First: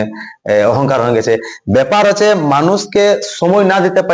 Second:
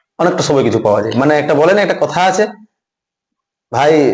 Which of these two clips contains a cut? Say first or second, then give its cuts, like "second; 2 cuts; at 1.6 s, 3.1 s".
second; 1 cut; at 1.1 s